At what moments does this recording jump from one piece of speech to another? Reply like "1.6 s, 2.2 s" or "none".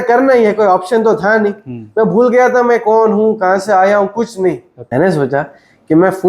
4.7 s